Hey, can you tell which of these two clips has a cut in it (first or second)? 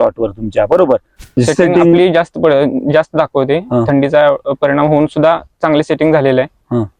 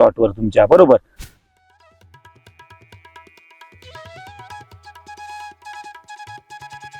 first